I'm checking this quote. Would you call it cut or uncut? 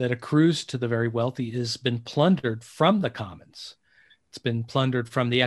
uncut